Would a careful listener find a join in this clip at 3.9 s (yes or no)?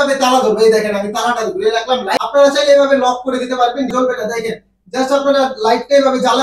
yes